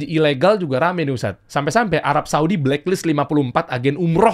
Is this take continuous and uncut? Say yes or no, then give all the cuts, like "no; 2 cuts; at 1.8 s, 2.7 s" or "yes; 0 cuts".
yes; 0 cuts